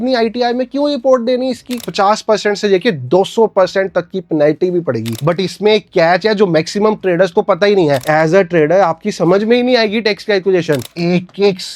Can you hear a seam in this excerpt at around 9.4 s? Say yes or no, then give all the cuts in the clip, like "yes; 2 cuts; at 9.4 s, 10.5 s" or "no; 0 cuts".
no; 4 cuts; at 1.8 s, 5.2 s, 8.0 s, 10.8 s